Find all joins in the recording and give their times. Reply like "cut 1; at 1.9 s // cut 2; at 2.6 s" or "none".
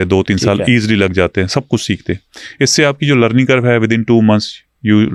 none